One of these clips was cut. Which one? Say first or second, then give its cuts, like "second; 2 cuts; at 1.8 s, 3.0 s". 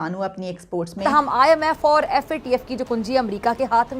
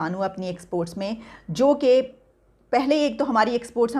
first; 1 cut; at 0.9 s